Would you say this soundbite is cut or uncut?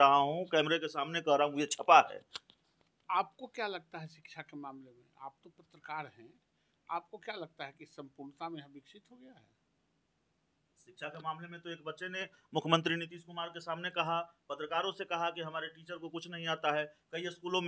uncut